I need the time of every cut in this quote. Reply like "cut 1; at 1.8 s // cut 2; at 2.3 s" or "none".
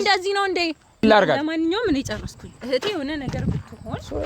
cut 1; at 1.0 s